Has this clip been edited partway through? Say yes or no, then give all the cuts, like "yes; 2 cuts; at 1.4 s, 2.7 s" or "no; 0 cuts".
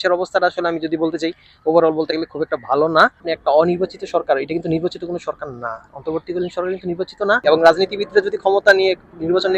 yes; 2 cuts; at 3.2 s, 7.4 s